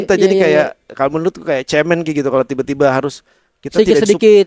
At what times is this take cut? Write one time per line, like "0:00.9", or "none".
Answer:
none